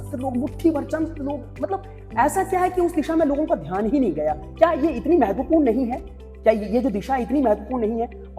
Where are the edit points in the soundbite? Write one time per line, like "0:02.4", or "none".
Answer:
none